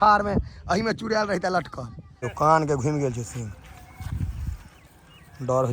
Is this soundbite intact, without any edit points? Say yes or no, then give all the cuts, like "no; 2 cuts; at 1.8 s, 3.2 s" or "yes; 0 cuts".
no; 1 cut; at 2.3 s